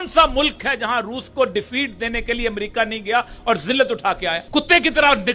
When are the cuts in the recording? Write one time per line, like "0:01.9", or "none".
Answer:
0:04.4